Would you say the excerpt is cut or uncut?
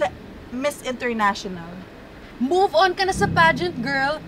cut